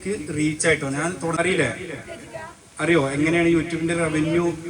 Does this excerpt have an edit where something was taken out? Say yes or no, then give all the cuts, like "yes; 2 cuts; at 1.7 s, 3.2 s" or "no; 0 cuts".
yes; 1 cut; at 1.3 s